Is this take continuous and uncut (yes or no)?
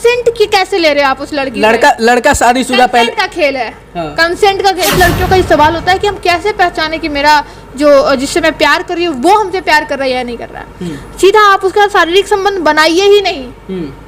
no